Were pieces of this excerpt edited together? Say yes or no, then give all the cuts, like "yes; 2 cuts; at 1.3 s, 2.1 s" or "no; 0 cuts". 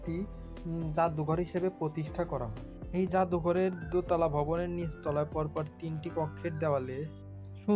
no; 0 cuts